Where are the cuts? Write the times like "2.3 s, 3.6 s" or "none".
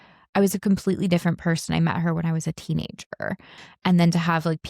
3.6 s